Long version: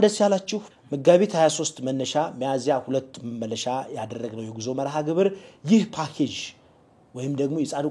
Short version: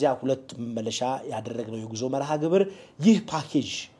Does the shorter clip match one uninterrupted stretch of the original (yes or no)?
yes